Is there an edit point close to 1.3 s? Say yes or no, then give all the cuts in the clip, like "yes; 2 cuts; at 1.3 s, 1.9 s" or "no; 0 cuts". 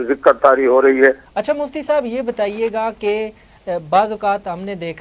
yes; 1 cut; at 1.3 s